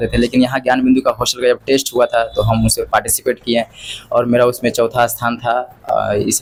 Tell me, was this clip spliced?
no; 0 cuts

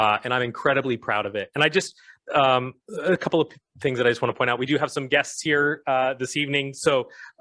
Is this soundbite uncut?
yes; 0 cuts

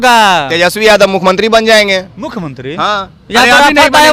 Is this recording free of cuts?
yes; 0 cuts

